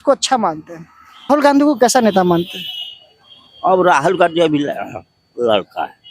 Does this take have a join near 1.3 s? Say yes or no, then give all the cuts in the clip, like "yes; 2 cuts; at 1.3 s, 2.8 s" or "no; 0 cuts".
yes; 1 cut; at 1.3 s